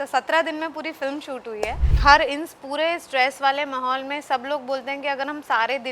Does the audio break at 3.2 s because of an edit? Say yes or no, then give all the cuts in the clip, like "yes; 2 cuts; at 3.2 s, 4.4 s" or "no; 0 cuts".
no; 1 cut; at 1.9 s